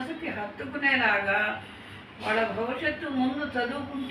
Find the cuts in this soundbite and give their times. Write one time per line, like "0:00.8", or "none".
none